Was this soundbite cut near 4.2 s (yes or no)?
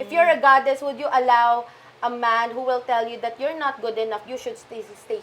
yes